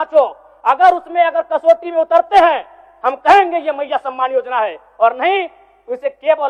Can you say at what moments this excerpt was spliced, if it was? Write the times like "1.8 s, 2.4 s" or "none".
none

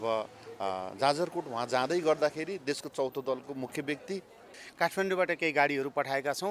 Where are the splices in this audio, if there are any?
4.6 s

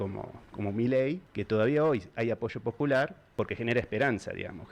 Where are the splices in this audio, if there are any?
1.3 s, 3.2 s

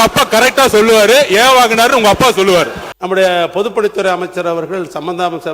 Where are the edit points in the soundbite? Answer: 2.9 s

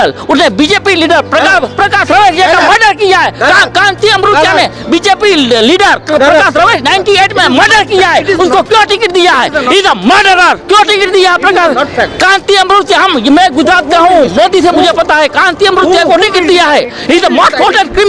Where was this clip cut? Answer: none

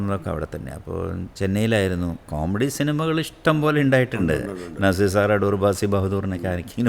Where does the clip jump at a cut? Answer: 2.2 s

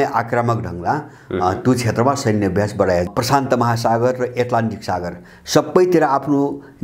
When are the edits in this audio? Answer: 3.1 s

